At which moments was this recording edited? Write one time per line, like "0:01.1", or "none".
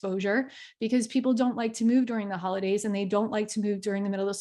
none